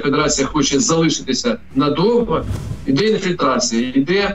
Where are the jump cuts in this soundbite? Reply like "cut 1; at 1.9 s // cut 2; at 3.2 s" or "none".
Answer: cut 1; at 2.6 s